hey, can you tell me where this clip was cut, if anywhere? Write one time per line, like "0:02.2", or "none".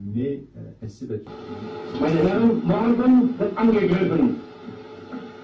0:01.0